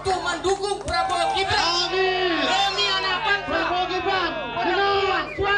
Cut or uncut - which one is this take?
uncut